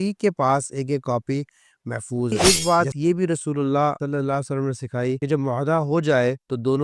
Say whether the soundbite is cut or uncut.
cut